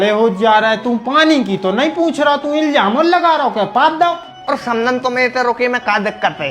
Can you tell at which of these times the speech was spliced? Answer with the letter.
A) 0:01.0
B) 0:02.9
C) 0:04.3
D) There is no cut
C